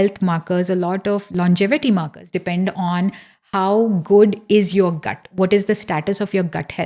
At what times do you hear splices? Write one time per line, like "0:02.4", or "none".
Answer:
none